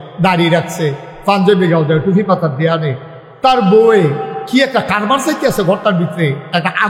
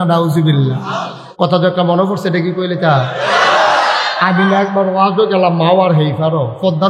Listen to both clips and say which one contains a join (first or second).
second